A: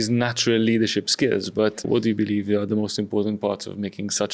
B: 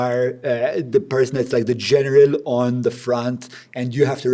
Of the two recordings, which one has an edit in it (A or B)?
A